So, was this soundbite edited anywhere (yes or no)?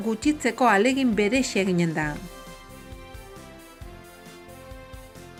no